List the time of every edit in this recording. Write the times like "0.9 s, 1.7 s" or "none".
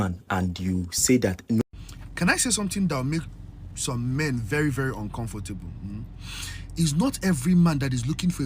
1.6 s